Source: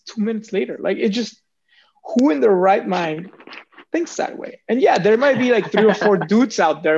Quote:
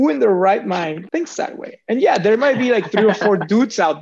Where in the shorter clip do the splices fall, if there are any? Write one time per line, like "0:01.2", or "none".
0:01.0